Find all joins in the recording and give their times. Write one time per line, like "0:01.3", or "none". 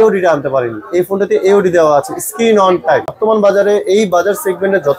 0:03.1